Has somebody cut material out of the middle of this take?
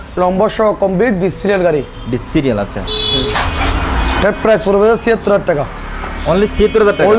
no; 0 cuts

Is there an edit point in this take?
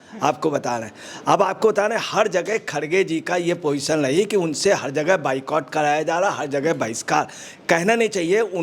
no; 0 cuts

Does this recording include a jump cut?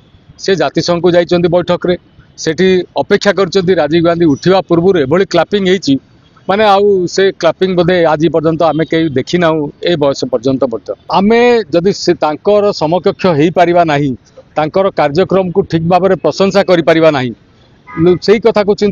yes; 1 cut; at 11.0 s

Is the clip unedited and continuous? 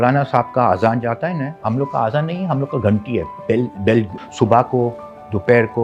no; 2 cuts; at 1.5 s, 4.2 s

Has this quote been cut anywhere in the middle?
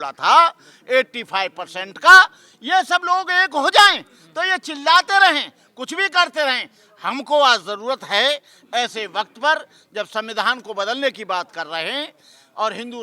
no; 0 cuts

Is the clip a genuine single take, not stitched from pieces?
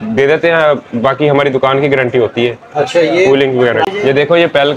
no; 1 cut; at 3.9 s

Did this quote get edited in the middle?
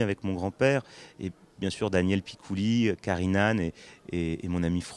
no; 0 cuts

